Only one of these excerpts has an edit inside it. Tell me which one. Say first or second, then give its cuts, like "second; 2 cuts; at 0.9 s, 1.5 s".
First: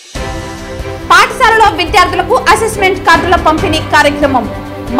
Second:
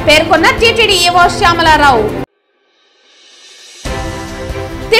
first; 1 cut; at 0.9 s